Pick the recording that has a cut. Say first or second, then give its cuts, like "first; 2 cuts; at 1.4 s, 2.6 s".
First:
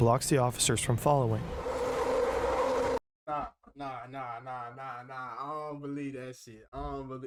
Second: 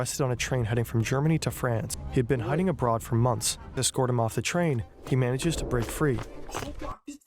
second; 2 cuts; at 2.0 s, 3.8 s